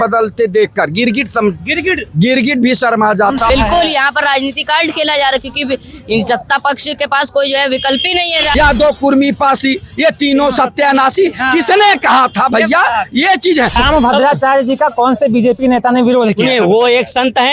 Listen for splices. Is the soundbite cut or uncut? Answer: cut